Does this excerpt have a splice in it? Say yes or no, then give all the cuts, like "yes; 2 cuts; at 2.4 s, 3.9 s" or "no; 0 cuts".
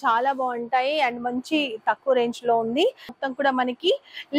yes; 1 cut; at 3.2 s